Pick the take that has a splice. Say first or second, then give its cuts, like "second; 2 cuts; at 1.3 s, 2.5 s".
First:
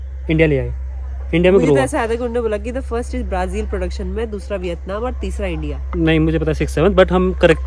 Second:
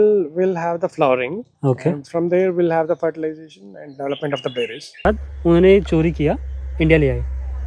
second; 1 cut; at 5.0 s